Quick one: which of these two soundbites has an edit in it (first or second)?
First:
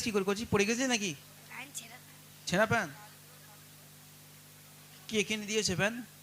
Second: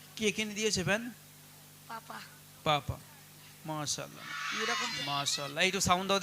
second